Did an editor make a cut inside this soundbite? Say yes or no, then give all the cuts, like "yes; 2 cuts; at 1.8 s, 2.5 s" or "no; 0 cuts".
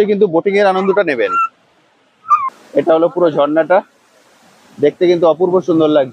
yes; 1 cut; at 2.5 s